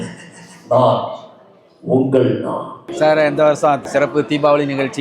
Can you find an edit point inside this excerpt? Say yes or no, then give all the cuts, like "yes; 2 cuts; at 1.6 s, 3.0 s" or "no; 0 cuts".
yes; 2 cuts; at 2.8 s, 3.9 s